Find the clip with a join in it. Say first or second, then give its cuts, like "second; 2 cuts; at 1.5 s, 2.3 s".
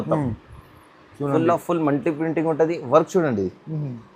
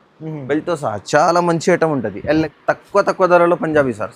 second; 1 cut; at 2.5 s